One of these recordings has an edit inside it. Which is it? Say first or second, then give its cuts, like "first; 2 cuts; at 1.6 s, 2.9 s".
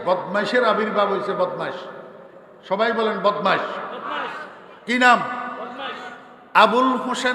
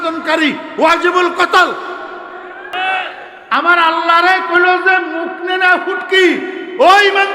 second; 1 cut; at 2.7 s